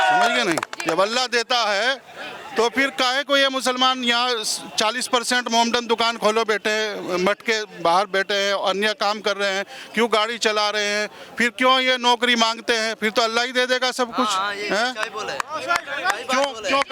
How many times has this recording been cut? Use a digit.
0